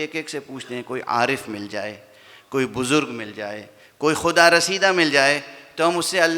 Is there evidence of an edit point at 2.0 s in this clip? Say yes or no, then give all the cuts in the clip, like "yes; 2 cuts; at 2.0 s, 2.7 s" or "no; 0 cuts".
no; 0 cuts